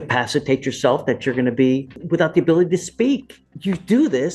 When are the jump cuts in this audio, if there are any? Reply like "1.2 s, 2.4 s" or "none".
1.9 s, 3.4 s